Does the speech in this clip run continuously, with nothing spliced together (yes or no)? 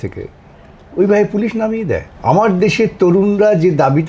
no